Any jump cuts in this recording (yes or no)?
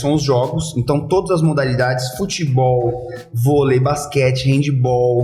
no